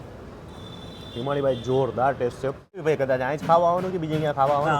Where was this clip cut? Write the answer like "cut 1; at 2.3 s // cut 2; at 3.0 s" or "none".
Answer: cut 1; at 2.8 s